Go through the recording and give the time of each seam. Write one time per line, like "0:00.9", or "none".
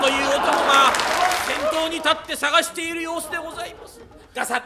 none